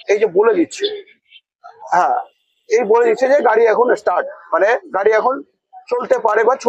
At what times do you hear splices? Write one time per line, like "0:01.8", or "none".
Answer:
none